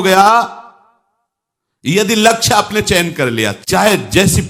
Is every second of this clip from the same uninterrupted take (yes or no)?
no